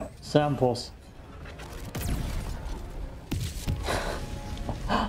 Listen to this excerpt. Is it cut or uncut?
uncut